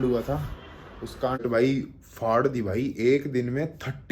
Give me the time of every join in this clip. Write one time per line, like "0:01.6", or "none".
0:01.4